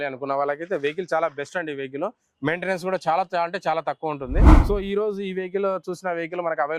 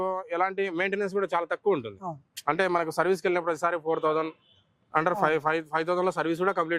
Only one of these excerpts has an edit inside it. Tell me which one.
first; 1 cut; at 4.5 s

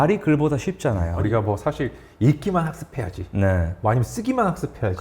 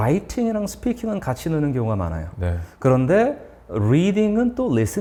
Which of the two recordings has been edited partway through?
first; 1 cut; at 1.1 s

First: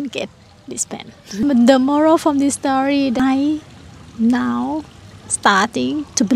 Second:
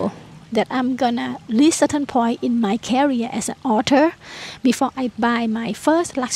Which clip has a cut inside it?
first; 2 cuts; at 1.4 s, 3.2 s

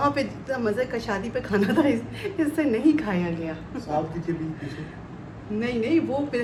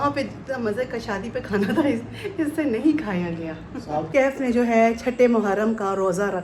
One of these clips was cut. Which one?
second; 1 cut; at 4.1 s

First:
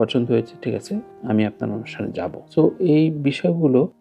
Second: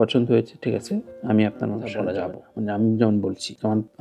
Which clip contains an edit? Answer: second; 1 cut; at 2.4 s

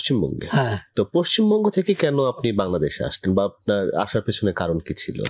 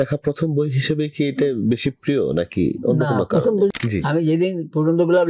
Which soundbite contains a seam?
second; 1 cut; at 3.7 s

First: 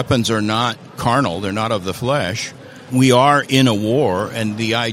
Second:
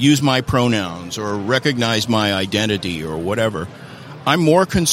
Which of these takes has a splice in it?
first; 2 cuts; at 0.9 s, 2.9 s

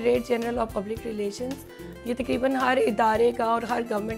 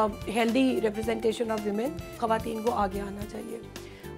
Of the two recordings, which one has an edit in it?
second; 1 cut; at 2.2 s

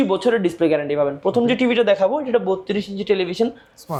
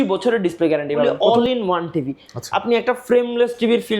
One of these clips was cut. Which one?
second; 1 cut; at 1.1 s

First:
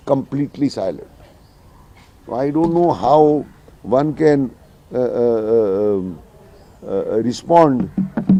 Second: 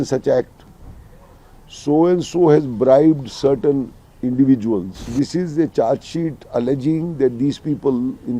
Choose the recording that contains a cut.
second; 1 cut; at 5.1 s

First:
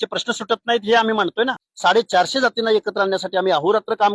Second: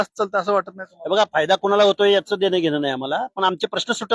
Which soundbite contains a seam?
first; 1 cut; at 1.6 s

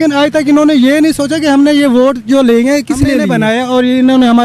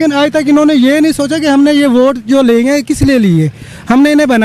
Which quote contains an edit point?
first; 1 cut; at 3.3 s

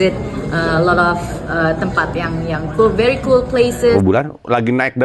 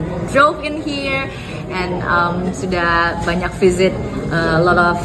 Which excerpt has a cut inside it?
first; 1 cut; at 4.0 s

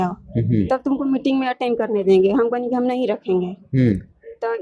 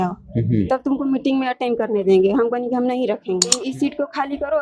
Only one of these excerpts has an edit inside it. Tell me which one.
second; 1 cut; at 3.6 s

